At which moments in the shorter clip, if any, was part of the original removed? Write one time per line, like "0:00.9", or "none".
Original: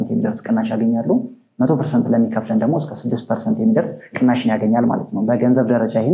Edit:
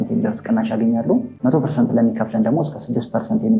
0:01.3